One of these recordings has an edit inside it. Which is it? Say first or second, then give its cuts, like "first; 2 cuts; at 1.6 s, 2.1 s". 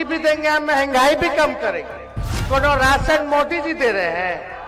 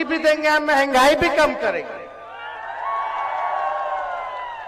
first; 1 cut; at 2.4 s